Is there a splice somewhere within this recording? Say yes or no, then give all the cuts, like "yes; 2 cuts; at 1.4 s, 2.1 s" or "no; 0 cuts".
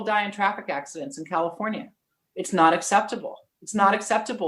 no; 0 cuts